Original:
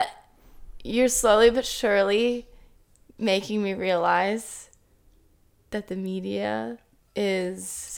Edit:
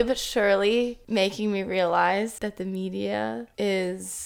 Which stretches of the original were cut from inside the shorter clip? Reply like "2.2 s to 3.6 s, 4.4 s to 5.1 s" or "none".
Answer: 2.5 s to 3.1 s, 4.5 s to 5.7 s, 6.8 s to 7.0 s